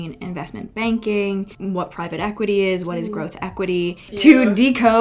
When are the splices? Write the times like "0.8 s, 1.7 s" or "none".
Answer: 1.5 s, 4.1 s